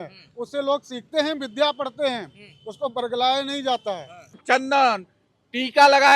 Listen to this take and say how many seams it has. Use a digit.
1